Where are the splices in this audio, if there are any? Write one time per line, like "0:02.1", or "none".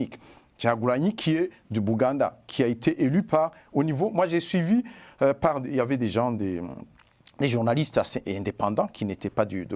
none